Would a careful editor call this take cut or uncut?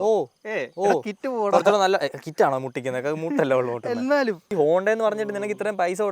cut